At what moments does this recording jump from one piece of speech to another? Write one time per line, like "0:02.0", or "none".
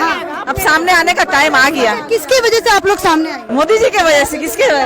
0:03.4